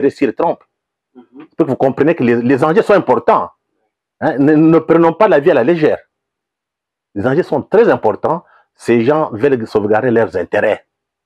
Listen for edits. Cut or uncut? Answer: uncut